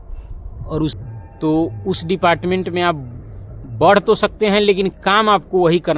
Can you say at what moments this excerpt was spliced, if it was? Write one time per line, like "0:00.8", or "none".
0:00.9